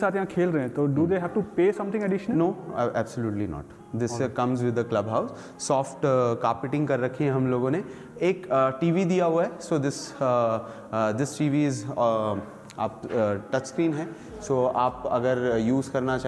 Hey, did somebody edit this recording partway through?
no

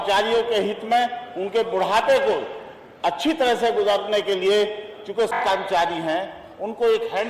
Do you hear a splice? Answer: yes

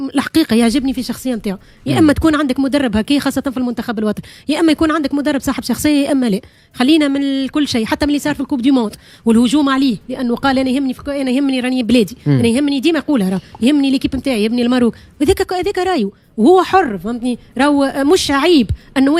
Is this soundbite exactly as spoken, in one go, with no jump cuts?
yes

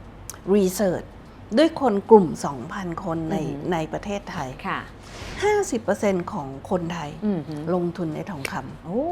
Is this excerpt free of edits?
no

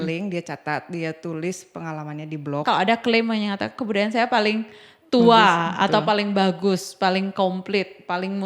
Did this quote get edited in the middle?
yes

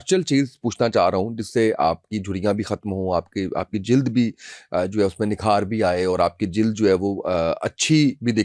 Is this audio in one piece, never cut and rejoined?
yes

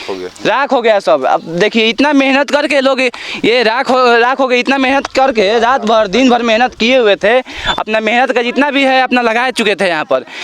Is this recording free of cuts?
yes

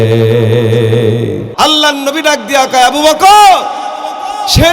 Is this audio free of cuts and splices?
no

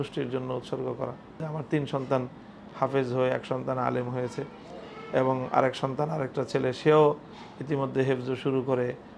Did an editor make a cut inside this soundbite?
yes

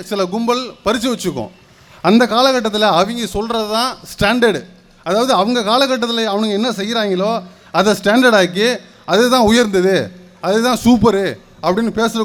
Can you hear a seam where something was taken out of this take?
no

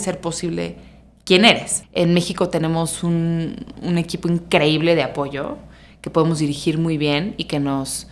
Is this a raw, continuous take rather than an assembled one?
no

